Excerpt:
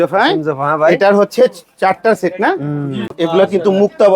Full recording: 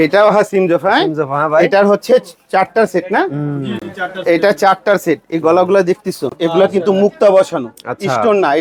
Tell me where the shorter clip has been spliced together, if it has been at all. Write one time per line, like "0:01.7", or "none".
0:03.1